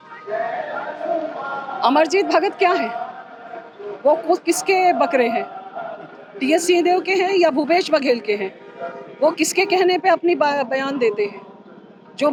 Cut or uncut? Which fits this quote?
uncut